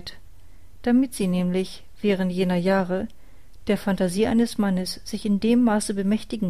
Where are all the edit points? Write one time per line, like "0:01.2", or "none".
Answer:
0:03.8